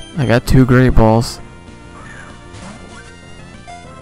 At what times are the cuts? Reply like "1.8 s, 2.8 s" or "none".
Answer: 1.3 s